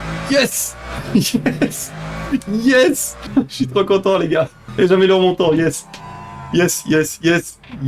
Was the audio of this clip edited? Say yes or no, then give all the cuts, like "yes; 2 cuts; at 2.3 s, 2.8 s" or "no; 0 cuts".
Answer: yes; 2 cuts; at 3.1 s, 4.6 s